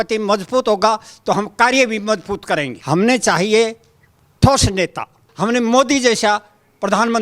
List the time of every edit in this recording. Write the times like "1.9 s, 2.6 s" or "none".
2.8 s, 5.2 s